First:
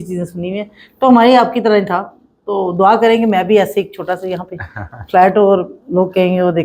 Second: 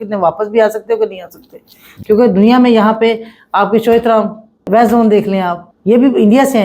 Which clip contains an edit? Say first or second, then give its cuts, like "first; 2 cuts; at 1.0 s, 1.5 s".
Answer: second; 2 cuts; at 4.7 s, 5.7 s